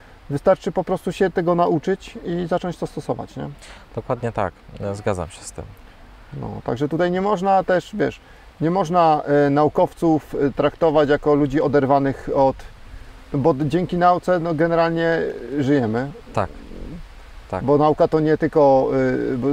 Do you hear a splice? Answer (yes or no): no